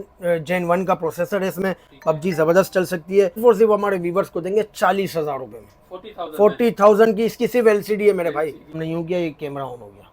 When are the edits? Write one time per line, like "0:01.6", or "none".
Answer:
0:03.4
0:08.7